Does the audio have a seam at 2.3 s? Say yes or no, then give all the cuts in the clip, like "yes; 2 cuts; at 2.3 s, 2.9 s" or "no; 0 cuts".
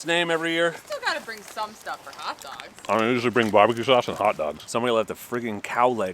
no; 2 cuts; at 0.8 s, 4.6 s